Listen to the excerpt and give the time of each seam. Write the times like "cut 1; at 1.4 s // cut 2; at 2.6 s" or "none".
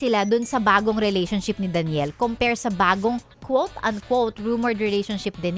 none